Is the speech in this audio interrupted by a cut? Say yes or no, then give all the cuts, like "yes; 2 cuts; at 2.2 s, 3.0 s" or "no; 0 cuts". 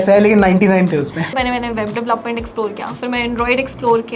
yes; 1 cut; at 1.3 s